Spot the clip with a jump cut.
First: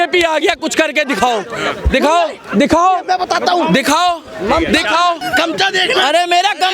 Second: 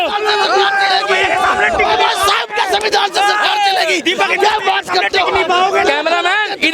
first; 1 cut; at 5.2 s

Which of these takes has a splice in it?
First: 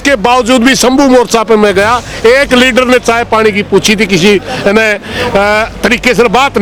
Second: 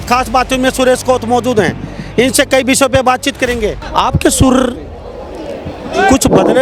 second; 1 cut; at 3.9 s

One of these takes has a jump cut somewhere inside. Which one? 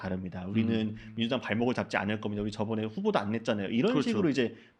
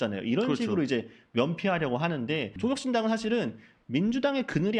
second; 1 cut; at 2.5 s

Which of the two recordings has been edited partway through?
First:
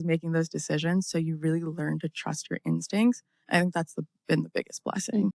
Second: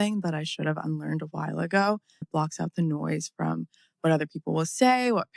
second; 1 cut; at 2.3 s

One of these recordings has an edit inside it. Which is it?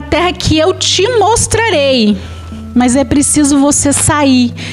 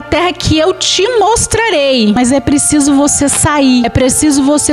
second; 2 cuts; at 2.2 s, 3.9 s

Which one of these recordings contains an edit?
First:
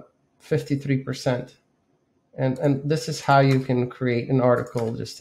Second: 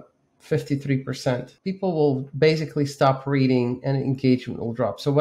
second; 1 cut; at 1.6 s

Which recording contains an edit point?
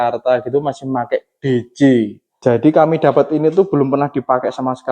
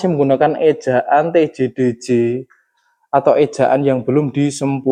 first; 1 cut; at 2.2 s

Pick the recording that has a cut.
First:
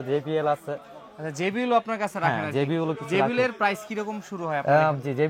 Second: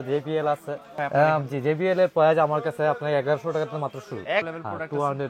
second; 2 cuts; at 0.9 s, 4.4 s

